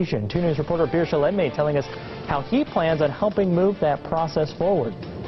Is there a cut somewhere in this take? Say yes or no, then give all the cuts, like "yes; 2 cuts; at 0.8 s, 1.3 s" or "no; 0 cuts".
yes; 2 cuts; at 1.1 s, 3.7 s